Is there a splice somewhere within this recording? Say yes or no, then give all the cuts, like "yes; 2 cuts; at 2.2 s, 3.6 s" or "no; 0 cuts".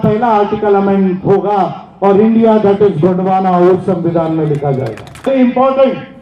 yes; 1 cut; at 5.3 s